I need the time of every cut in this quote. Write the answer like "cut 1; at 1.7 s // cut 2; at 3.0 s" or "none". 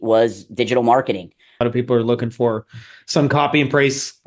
cut 1; at 1.6 s

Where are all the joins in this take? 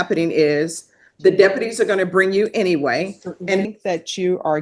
cut 1; at 3.6 s

